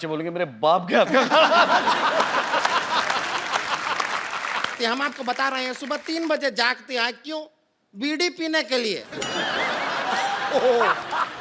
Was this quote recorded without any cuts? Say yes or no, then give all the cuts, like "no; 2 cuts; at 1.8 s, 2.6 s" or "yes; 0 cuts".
no; 1 cut; at 4.7 s